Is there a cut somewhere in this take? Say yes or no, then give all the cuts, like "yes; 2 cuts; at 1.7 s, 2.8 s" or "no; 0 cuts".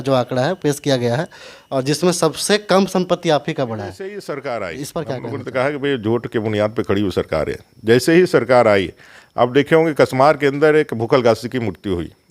yes; 1 cut; at 4.1 s